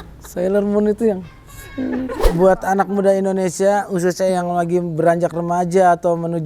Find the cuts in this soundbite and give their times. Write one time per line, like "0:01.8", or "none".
0:02.2